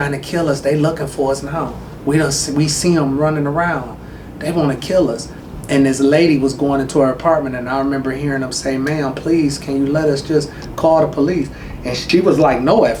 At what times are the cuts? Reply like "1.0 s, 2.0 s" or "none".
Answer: none